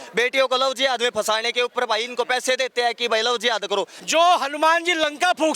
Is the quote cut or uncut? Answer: cut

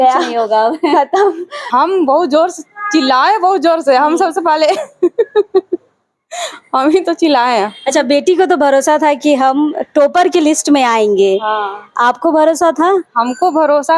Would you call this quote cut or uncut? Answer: cut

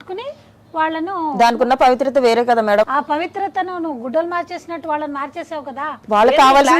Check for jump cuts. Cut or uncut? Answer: cut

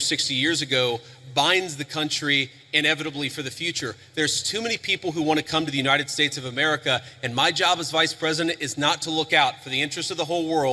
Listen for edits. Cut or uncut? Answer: uncut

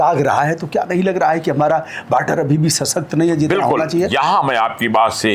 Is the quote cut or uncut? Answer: uncut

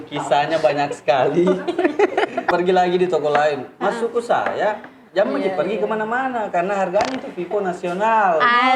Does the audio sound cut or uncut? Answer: cut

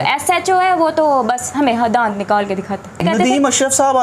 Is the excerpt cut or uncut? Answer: cut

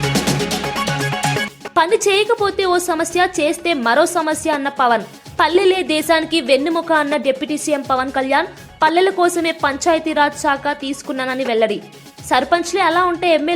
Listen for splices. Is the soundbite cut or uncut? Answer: cut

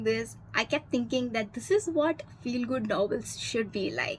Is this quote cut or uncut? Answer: uncut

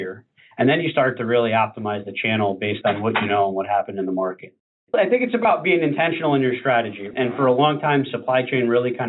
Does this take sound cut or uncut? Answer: cut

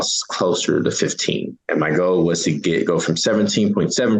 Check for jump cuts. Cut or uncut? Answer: cut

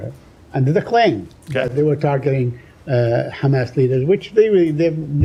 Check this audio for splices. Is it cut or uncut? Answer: uncut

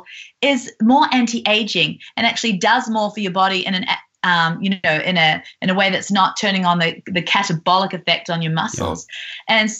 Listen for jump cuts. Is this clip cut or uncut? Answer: uncut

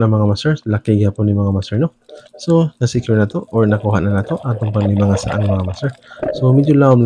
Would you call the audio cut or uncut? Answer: uncut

